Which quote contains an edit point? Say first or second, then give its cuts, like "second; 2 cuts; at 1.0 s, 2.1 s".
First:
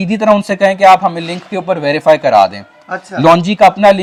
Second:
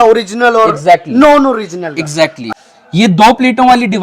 second; 1 cut; at 2.5 s